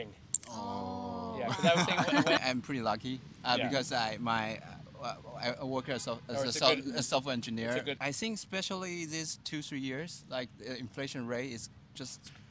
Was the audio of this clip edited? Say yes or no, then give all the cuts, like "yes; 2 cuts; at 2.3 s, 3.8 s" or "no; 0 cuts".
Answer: yes; 2 cuts; at 2.4 s, 8.0 s